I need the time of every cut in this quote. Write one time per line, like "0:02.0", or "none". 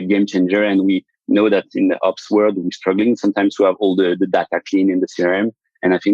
0:02.6

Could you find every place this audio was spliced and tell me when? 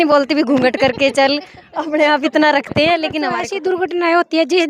0:03.5

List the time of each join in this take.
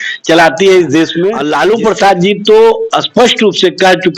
0:01.4

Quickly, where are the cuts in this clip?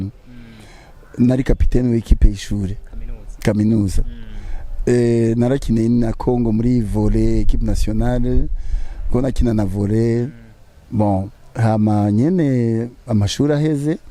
none

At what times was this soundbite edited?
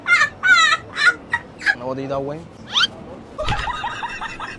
0:03.4

